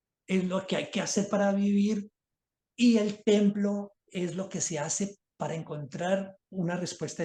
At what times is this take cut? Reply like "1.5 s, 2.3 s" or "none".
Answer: none

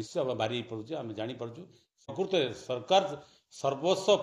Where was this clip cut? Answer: 2.1 s

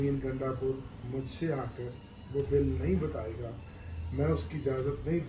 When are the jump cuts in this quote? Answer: none

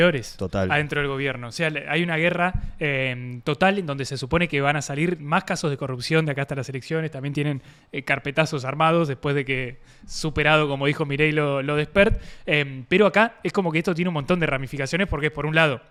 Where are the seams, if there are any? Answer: none

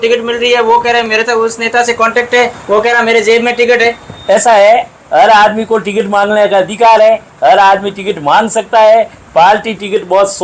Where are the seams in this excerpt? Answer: none

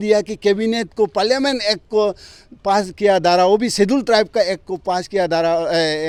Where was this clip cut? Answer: none

